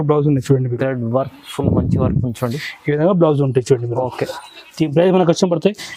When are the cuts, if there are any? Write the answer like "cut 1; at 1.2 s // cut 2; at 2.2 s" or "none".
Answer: none